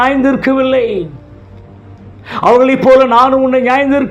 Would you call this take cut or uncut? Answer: uncut